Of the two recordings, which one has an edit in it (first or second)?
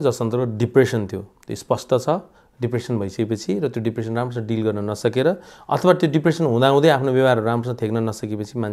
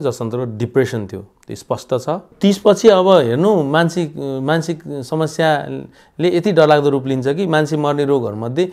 second